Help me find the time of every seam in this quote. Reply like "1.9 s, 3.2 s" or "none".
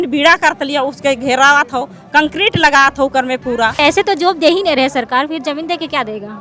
3.8 s